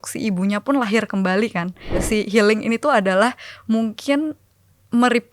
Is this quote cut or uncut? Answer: cut